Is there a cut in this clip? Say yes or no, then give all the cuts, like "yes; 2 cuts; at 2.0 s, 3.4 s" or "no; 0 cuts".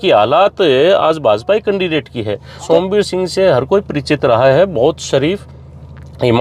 yes; 1 cut; at 2.6 s